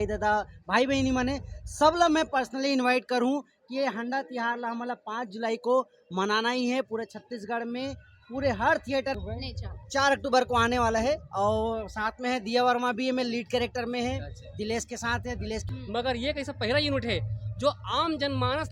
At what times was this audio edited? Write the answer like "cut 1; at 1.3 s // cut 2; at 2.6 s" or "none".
cut 1; at 9.1 s // cut 2; at 15.7 s